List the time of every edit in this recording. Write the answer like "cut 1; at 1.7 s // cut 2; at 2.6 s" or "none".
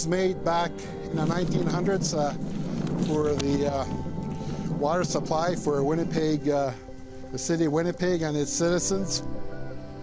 cut 1; at 2.9 s